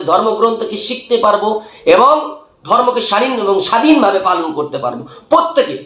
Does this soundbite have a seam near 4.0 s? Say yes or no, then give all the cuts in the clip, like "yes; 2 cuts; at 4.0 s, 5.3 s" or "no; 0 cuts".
no; 0 cuts